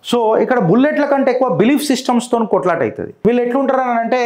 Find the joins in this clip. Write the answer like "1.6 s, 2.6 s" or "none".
3.1 s